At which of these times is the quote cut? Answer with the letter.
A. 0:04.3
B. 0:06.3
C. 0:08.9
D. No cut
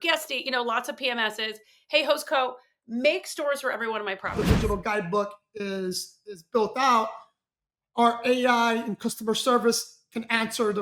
A